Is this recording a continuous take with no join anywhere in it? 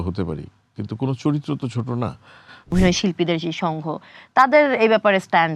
no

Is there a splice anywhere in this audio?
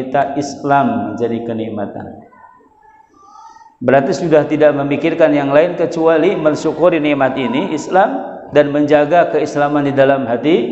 no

